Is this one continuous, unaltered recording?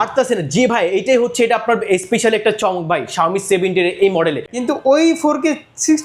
no; 1 cut; at 4.5 s

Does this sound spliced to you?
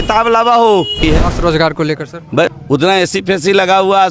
yes; 2 cuts; at 1.0 s, 2.5 s

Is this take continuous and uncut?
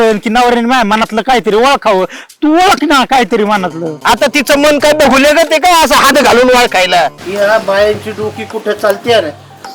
no; 1 cut; at 7.2 s

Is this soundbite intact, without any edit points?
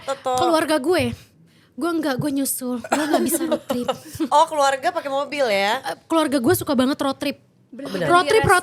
yes; 0 cuts

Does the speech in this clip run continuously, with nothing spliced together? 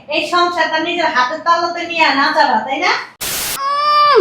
no; 1 cut; at 3.3 s

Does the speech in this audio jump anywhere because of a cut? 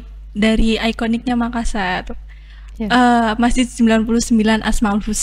no; 0 cuts

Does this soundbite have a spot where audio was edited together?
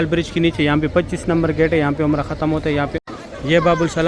yes; 1 cut; at 3.0 s

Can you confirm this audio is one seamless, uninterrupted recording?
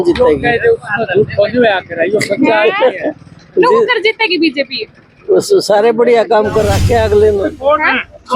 yes; 0 cuts

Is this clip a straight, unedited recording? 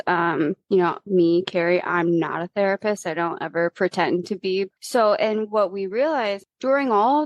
no; 2 cuts; at 4.7 s, 6.4 s

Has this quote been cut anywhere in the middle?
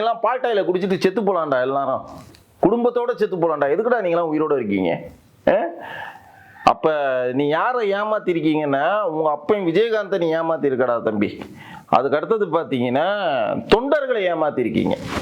no; 0 cuts

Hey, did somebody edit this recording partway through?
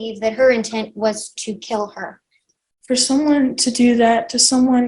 yes; 1 cut; at 2.5 s

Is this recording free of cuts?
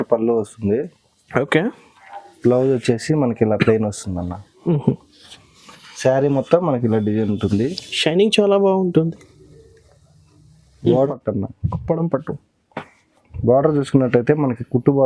no; 1 cut; at 11.1 s

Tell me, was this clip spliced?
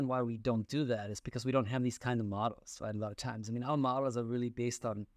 no; 0 cuts

